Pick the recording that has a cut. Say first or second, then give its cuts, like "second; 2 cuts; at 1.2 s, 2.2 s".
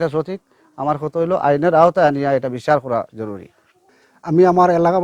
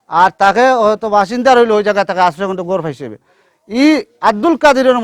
first; 1 cut; at 3.7 s